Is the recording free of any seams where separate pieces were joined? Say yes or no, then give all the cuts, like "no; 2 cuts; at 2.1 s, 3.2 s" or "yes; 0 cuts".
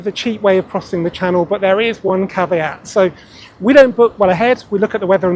yes; 0 cuts